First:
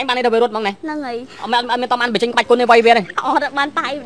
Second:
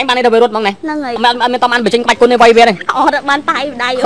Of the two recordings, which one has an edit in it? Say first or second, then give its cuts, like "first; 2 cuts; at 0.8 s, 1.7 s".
second; 1 cut; at 1.1 s